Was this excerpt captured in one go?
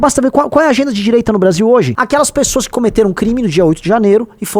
no; 1 cut; at 2.0 s

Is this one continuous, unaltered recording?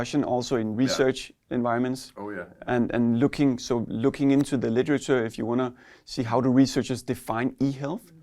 yes; 0 cuts

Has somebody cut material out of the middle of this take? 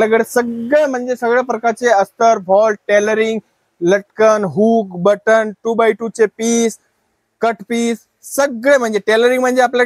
no; 0 cuts

